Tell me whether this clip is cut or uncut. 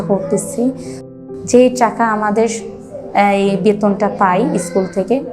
cut